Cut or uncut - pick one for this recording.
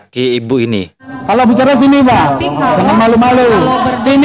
cut